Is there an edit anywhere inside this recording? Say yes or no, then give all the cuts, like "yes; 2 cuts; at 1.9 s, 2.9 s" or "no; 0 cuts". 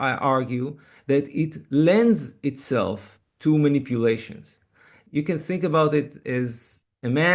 yes; 2 cuts; at 5.0 s, 6.3 s